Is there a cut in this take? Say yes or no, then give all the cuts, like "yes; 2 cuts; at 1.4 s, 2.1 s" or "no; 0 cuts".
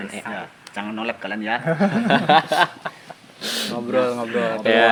no; 0 cuts